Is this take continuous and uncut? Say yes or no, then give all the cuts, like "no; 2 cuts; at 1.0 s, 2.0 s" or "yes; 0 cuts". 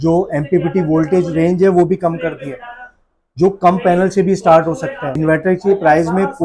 no; 1 cut; at 5.1 s